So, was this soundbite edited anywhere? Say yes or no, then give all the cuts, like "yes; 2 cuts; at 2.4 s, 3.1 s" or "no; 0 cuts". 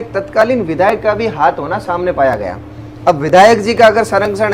no; 0 cuts